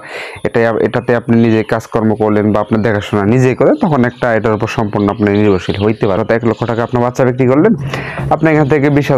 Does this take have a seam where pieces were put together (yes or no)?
yes